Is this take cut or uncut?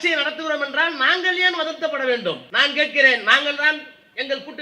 cut